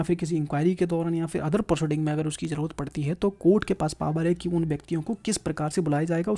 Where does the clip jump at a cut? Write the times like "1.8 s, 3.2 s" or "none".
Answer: none